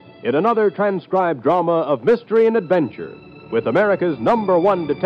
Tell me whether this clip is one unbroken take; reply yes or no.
no